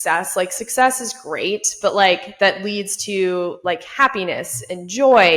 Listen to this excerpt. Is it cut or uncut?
uncut